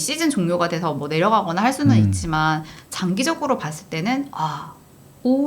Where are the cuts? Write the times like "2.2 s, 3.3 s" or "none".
2.8 s